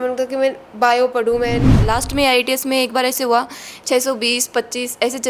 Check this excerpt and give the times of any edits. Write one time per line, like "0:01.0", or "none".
0:01.8

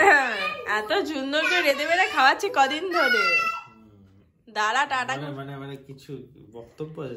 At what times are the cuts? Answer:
none

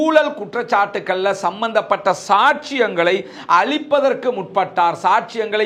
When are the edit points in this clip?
none

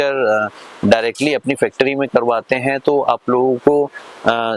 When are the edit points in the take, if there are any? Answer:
none

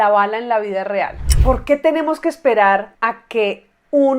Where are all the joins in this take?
0:01.2

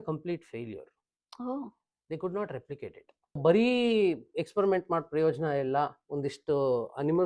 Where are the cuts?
0:03.4

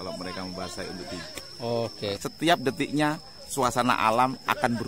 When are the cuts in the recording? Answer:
0:02.2

